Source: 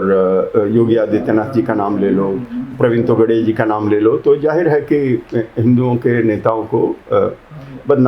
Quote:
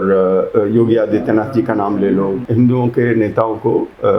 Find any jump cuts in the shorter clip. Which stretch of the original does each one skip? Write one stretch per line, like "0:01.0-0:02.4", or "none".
0:02.4-0:05.5

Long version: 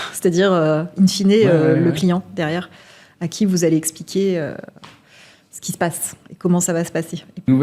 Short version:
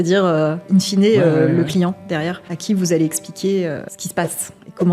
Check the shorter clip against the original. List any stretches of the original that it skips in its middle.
0:02.7-0:03.2
0:04.7-0:05.6

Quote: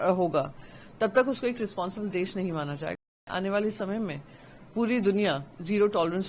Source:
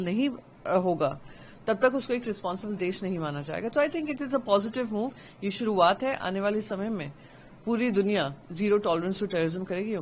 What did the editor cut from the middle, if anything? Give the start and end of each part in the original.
0:03.7-0:06.0

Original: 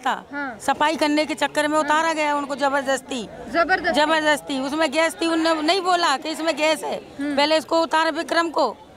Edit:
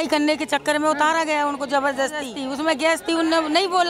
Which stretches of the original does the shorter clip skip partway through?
0:03.3-0:04.5

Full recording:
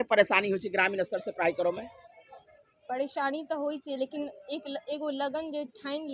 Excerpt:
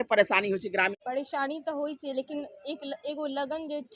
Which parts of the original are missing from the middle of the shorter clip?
0:00.9-0:02.8

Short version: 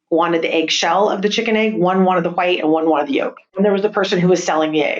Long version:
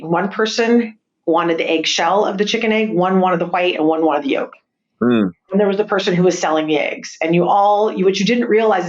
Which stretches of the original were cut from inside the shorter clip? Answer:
0:04.6-0:05.4

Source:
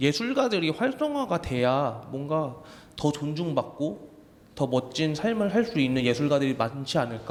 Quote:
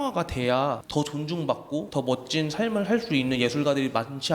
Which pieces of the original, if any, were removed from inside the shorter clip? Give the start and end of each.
0:02.0-0:02.9
0:04.0-0:04.5

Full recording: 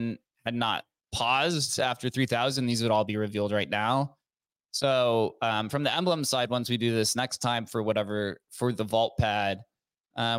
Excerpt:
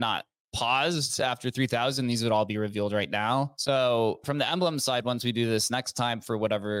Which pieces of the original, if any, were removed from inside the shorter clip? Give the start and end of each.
0:04.1-0:04.7
0:05.4-0:05.7

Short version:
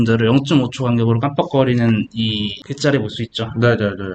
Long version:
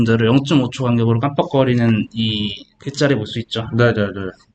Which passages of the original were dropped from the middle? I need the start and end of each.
0:02.6-0:02.8

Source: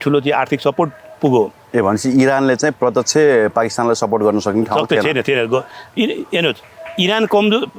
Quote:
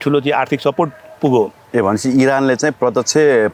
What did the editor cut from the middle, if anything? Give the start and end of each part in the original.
none

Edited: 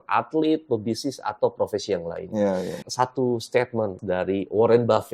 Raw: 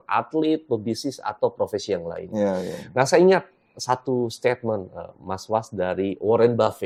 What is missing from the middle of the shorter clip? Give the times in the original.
0:02.8-0:03.6
0:04.9-0:05.7

